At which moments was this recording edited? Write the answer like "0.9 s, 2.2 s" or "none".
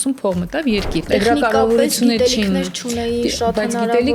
1.1 s